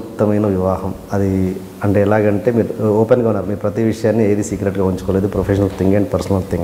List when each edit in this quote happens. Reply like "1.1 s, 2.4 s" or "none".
none